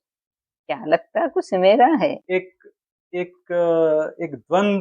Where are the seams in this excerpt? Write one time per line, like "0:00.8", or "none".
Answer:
0:02.2